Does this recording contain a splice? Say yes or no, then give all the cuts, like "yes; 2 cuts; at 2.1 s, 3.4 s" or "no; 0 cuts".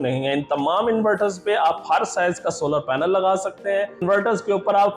yes; 1 cut; at 4.0 s